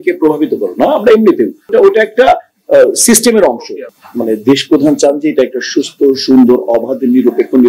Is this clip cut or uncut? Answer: cut